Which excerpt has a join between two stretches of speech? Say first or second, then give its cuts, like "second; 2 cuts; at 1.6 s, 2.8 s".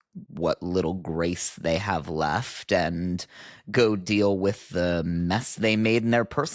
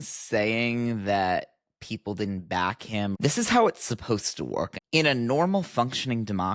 second; 2 cuts; at 3.2 s, 4.7 s